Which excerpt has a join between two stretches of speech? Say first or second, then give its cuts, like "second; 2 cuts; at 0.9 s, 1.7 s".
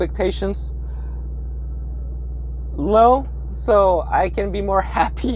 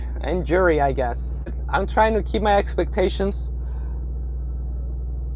second; 1 cut; at 1.6 s